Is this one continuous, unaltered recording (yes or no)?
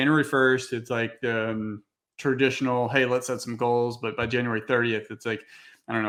yes